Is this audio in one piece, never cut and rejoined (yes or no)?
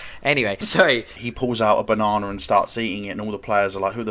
no